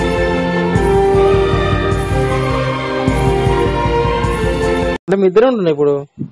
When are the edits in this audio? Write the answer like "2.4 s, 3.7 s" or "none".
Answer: 4.9 s